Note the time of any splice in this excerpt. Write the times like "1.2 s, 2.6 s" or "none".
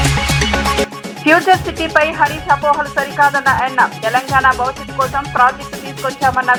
none